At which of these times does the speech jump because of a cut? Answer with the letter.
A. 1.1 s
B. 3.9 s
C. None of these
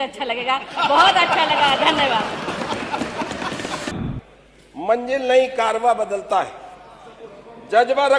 B